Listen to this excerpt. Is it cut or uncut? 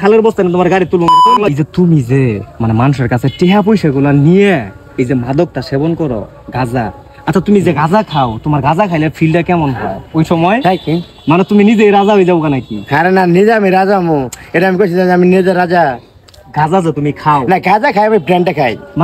cut